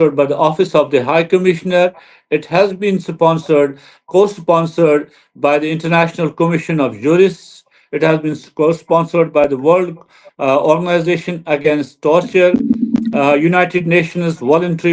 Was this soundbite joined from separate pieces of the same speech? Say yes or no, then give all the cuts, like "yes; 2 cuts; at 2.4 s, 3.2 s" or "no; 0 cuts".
no; 0 cuts